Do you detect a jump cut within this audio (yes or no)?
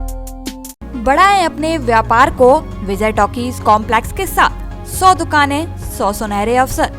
no